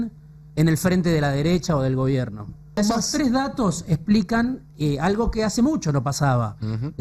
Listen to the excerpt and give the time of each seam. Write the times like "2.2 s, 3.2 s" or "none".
2.8 s